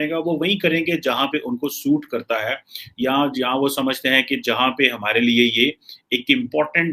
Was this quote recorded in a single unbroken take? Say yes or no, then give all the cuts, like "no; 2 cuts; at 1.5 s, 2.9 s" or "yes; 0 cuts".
yes; 0 cuts